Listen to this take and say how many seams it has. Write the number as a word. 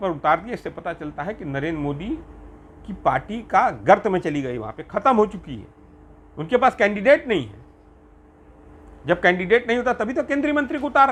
zero